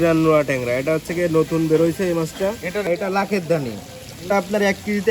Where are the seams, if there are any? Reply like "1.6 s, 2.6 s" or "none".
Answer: 2.9 s, 4.3 s